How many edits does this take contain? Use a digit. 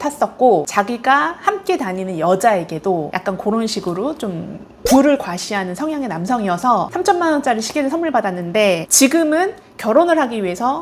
0